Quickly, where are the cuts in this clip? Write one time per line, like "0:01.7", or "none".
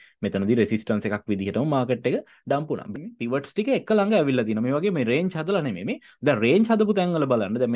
0:02.9